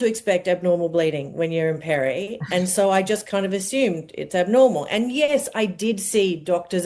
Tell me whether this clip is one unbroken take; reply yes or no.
yes